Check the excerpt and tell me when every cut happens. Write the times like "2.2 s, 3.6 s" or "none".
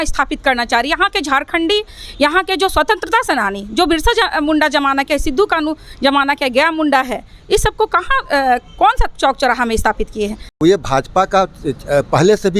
10.6 s